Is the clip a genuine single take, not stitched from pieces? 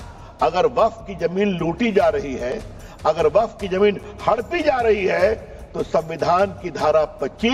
yes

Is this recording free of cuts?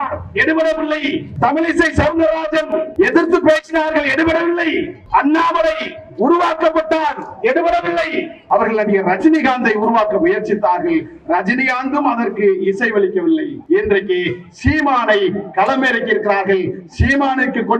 no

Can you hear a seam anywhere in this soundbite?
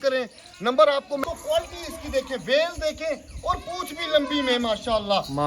yes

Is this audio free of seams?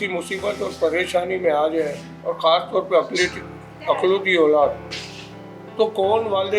yes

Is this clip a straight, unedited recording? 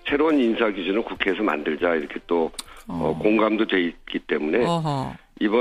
yes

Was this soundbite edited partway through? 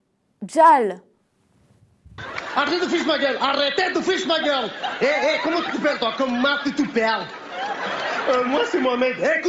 no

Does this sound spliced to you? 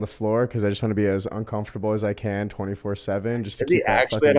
no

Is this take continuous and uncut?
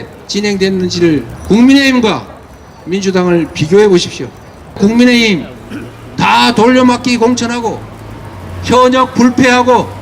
no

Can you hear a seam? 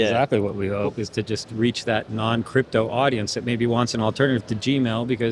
no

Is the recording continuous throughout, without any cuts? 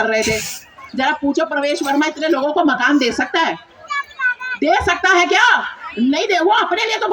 yes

